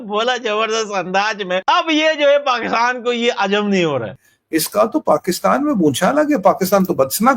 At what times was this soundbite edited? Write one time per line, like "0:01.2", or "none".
0:04.2